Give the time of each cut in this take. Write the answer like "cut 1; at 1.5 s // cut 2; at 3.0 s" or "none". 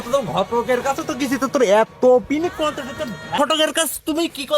cut 1; at 3.4 s

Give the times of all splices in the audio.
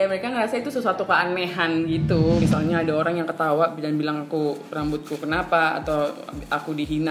cut 1; at 2.4 s

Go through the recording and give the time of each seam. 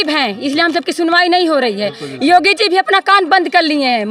none

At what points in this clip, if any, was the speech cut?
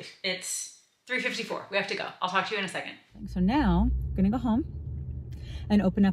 cut 1; at 3.3 s

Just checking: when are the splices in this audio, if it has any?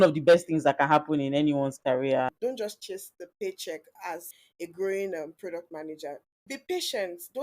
cut 1; at 2.3 s // cut 2; at 4.4 s // cut 3; at 6.5 s

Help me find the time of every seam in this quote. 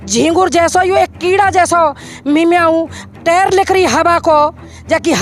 none

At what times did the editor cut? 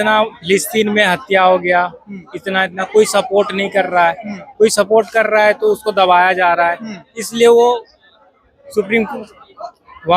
none

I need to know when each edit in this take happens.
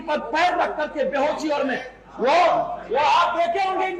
none

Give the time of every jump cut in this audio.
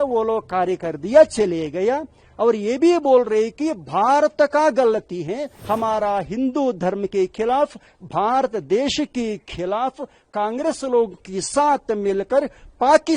cut 1; at 5.5 s

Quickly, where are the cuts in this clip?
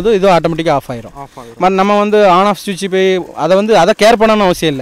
none

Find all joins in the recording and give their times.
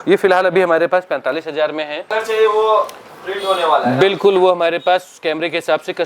cut 1; at 2.1 s

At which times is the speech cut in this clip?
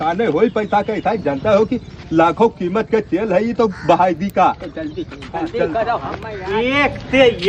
cut 1; at 6.3 s

